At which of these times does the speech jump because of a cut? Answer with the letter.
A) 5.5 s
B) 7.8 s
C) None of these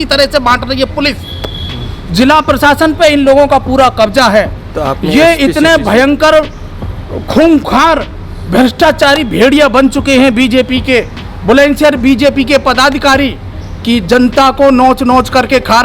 C